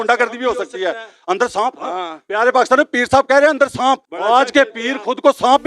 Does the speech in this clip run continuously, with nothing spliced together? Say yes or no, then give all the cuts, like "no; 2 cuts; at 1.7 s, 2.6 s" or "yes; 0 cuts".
no; 1 cut; at 4.1 s